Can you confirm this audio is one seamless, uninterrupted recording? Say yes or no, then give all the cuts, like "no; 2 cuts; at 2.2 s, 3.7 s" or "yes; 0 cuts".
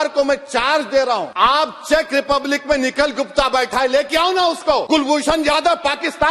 no; 2 cuts; at 1.3 s, 4.8 s